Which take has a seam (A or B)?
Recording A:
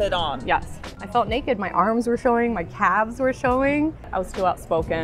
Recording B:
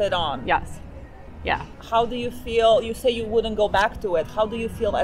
A